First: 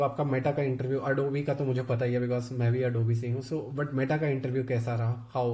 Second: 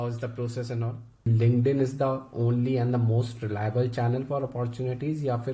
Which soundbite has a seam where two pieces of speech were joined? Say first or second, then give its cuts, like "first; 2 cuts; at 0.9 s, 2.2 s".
second; 1 cut; at 1.1 s